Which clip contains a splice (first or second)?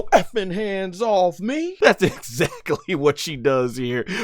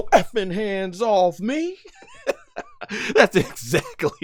first